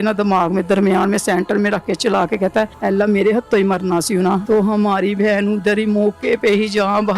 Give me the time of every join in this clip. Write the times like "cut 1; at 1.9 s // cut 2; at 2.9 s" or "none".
cut 1; at 2.7 s // cut 2; at 4.4 s